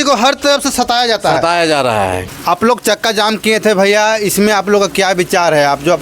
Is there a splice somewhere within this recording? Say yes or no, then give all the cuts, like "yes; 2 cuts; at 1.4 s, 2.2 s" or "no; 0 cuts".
yes; 1 cut; at 2.2 s